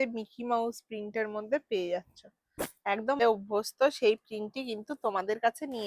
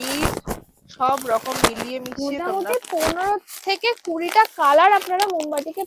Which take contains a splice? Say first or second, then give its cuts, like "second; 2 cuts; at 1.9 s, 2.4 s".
first; 1 cut; at 3.2 s